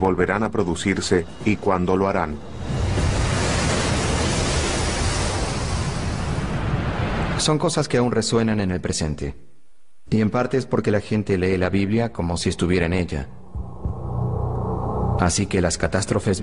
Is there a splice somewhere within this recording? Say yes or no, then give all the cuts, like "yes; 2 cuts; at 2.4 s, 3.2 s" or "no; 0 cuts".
no; 0 cuts